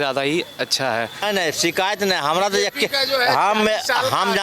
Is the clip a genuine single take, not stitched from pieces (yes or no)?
no